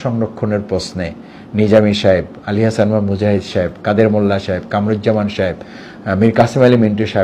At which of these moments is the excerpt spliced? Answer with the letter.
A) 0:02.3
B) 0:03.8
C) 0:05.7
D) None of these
D